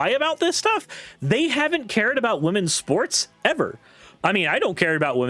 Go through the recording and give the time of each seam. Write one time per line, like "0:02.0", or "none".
none